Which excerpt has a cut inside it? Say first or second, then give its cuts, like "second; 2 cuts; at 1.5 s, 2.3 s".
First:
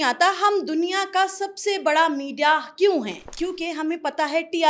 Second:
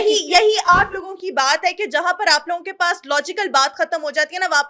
first; 1 cut; at 3.2 s